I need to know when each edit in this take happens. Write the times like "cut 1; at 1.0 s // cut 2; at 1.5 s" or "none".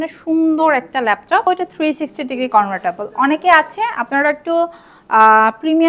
cut 1; at 1.4 s